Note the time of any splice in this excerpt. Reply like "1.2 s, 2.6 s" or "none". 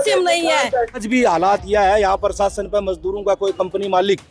0.9 s